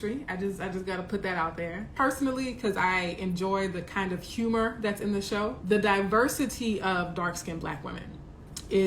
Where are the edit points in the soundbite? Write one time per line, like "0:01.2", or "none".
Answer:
0:01.9
0:05.6